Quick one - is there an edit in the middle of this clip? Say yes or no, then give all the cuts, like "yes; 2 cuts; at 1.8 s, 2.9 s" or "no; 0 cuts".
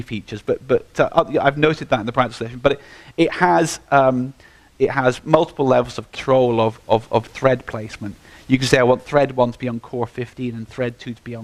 no; 0 cuts